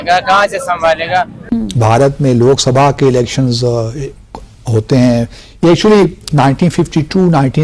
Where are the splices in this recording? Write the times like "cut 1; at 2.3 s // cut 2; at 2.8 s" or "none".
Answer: cut 1; at 1.4 s